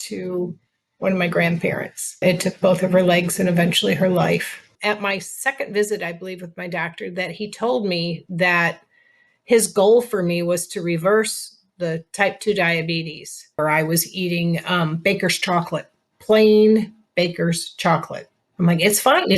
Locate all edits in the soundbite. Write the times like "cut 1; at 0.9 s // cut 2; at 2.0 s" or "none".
cut 1; at 2.2 s // cut 2; at 4.7 s // cut 3; at 13.6 s